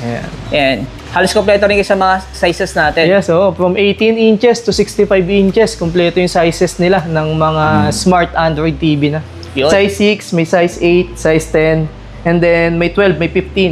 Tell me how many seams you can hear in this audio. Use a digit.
1